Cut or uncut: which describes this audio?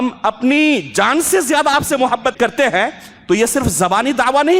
cut